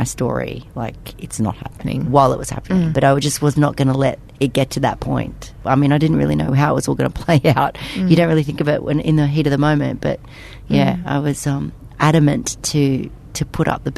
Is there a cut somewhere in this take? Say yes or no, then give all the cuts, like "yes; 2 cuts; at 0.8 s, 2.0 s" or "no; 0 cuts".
yes; 3 cuts; at 1.8 s, 2.9 s, 5.5 s